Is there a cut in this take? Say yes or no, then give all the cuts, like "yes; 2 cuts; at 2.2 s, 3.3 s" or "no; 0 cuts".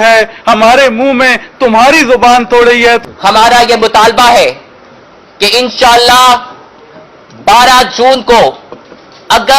yes; 1 cut; at 3.0 s